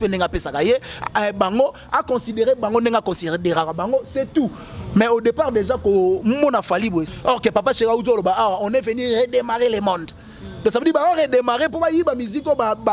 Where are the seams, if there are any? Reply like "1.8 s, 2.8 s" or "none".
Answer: 7.1 s